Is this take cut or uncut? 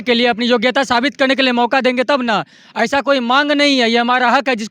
uncut